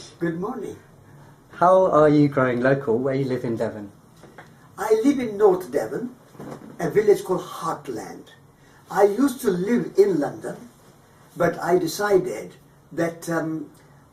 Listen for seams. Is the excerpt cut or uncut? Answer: cut